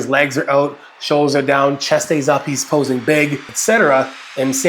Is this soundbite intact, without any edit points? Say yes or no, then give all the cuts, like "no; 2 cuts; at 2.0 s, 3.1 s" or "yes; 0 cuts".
no; 1 cut; at 3.5 s